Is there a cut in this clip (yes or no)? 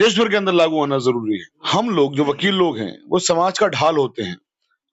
yes